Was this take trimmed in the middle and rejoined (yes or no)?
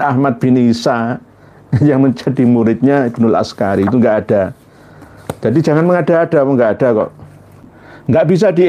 yes